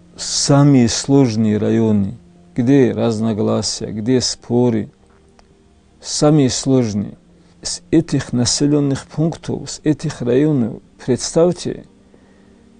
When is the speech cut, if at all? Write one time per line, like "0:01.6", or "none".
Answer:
none